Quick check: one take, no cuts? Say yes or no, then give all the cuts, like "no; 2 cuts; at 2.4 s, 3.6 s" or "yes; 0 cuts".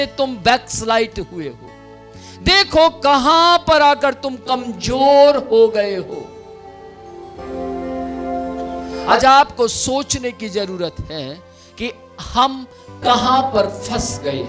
yes; 0 cuts